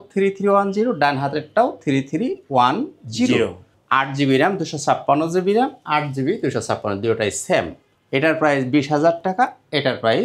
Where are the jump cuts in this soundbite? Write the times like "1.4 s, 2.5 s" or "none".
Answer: none